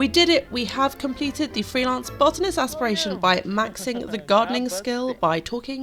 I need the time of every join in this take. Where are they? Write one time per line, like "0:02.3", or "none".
none